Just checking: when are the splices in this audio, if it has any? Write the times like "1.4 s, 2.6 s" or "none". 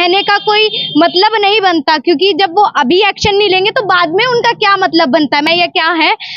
5.5 s